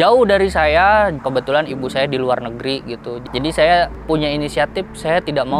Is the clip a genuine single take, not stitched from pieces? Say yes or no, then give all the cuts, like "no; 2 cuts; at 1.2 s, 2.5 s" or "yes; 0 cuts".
no; 1 cut; at 1.1 s